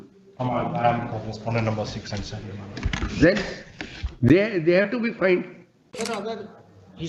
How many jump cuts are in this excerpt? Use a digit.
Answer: 1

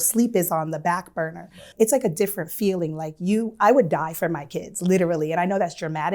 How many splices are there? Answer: 1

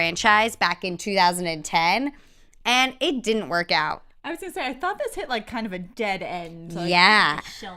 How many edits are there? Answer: 1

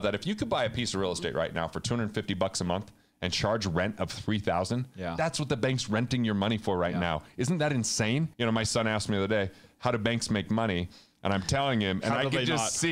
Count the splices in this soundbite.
1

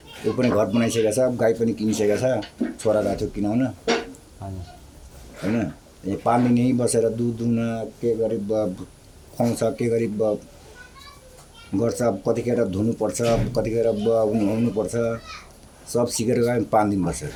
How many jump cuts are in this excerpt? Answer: 0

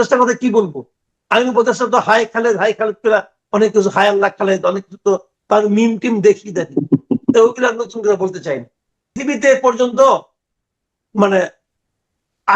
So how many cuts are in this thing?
1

